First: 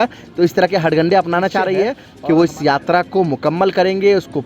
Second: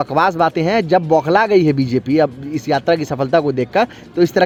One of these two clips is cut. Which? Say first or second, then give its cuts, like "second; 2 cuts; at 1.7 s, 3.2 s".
first; 1 cut; at 2.1 s